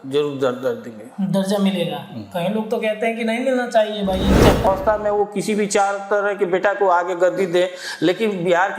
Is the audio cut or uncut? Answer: cut